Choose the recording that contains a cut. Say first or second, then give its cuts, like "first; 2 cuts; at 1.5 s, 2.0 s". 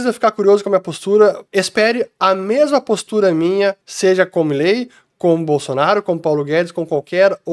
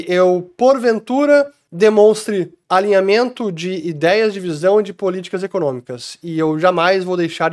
first; 2 cuts; at 1.4 s, 3.9 s